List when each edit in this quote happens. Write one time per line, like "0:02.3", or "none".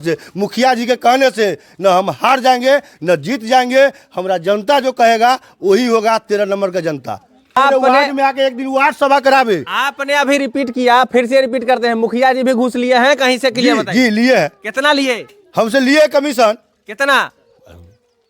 0:07.6